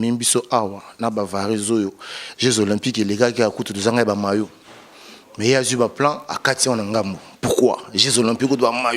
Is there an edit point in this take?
no; 0 cuts

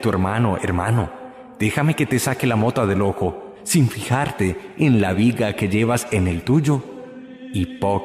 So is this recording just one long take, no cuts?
yes; 0 cuts

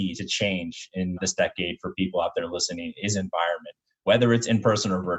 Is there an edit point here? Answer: yes; 1 cut; at 1.2 s

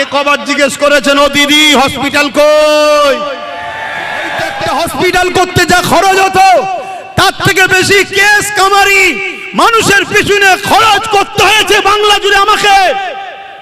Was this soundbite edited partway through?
yes; 1 cut; at 4.5 s

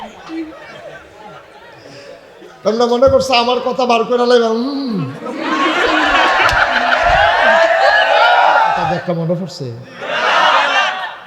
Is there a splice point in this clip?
yes; 1 cut; at 8.9 s

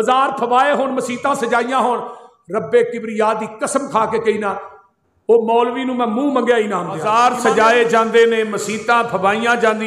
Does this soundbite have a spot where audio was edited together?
yes; 1 cut; at 7.0 s

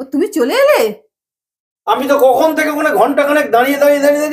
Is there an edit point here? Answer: no; 0 cuts

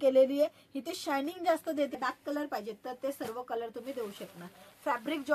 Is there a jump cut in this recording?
yes; 1 cut; at 2.0 s

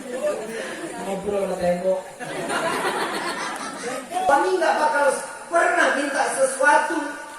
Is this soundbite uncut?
no; 1 cut; at 4.3 s

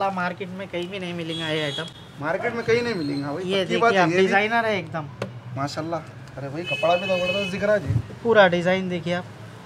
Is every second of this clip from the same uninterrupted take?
yes; 0 cuts

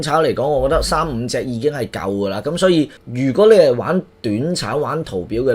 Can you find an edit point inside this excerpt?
yes; 1 cut; at 3.0 s

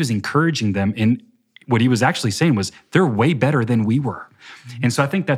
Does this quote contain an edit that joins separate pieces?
no; 0 cuts

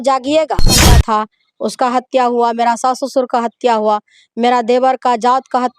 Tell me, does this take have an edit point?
yes; 1 cut; at 0.9 s

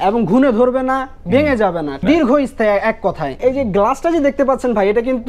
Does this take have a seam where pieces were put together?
yes; 2 cuts; at 2.0 s, 3.4 s

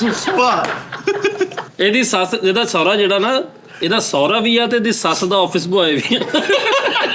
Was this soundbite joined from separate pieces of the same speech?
yes; 1 cut; at 1.6 s

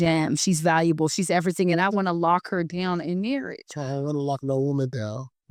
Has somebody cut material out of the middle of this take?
no; 0 cuts

